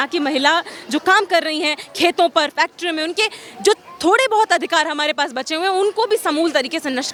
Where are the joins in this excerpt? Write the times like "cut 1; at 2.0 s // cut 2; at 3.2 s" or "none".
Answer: none